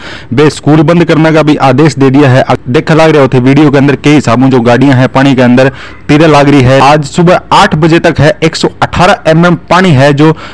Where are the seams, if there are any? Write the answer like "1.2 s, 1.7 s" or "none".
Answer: 2.6 s, 6.8 s